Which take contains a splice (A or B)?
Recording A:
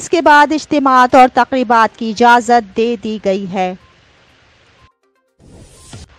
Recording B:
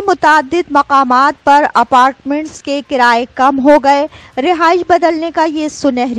A